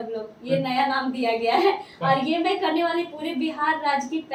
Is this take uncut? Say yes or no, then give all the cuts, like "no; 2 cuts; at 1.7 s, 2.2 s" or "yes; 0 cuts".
yes; 0 cuts